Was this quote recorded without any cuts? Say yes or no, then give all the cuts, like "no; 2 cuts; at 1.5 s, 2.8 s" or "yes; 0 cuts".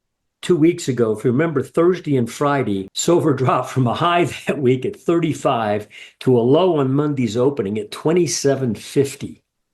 no; 1 cut; at 2.9 s